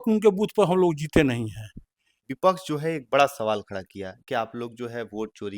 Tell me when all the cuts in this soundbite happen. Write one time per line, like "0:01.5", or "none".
0:02.3